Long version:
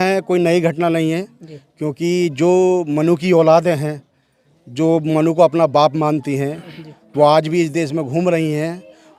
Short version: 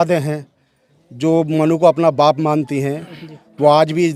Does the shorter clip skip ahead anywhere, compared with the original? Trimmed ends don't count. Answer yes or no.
no